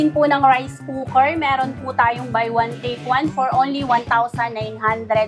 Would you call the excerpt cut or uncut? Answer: uncut